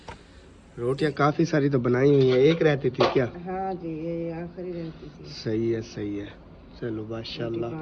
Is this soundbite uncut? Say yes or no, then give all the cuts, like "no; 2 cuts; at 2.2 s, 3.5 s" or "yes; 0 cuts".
yes; 0 cuts